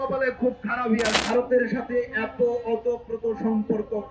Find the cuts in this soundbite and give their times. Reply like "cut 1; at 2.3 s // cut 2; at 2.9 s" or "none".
cut 1; at 1.2 s

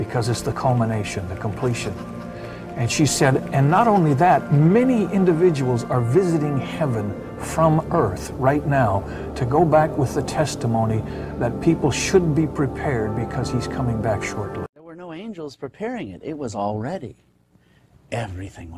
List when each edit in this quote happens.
cut 1; at 14.9 s

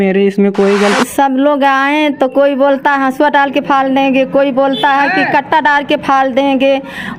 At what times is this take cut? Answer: cut 1; at 1.0 s

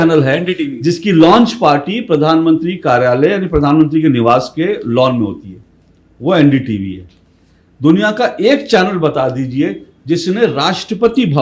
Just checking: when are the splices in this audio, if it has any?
none

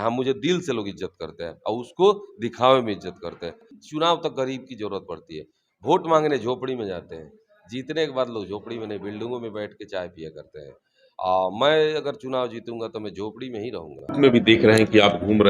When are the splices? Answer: cut 1; at 3.7 s // cut 2; at 14.1 s

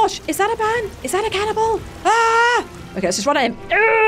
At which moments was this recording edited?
cut 1; at 1.0 s // cut 2; at 1.9 s // cut 3; at 2.8 s

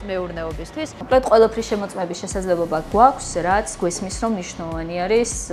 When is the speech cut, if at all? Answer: cut 1; at 1.0 s

